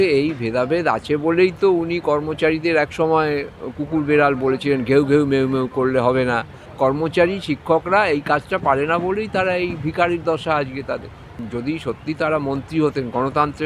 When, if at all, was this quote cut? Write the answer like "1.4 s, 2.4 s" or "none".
6.6 s, 11.3 s